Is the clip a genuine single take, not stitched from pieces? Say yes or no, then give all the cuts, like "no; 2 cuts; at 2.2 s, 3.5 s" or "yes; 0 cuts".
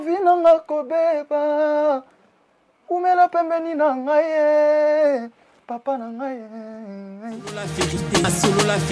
no; 1 cut; at 7.6 s